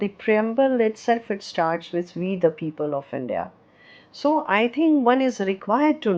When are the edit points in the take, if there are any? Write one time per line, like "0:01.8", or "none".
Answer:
none